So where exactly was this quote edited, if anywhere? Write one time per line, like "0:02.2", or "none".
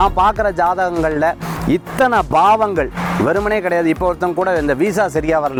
none

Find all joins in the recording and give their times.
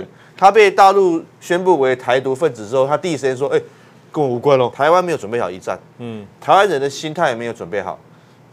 0:04.7

